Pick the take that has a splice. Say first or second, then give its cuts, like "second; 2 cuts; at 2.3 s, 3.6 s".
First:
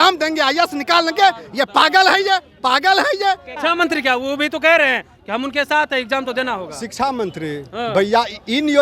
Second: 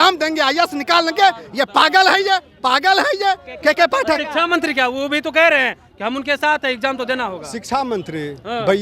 first; 1 cut; at 3.5 s